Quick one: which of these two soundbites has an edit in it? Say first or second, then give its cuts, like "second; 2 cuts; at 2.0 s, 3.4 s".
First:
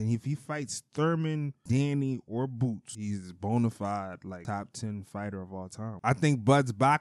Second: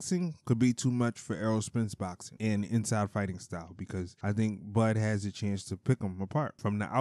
first; 2 cuts; at 2.9 s, 5.8 s